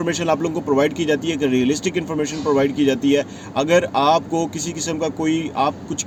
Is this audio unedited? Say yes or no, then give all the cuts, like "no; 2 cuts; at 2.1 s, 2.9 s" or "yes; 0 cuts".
yes; 0 cuts